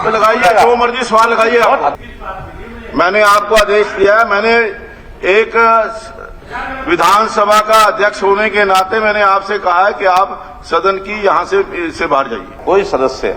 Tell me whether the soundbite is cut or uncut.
cut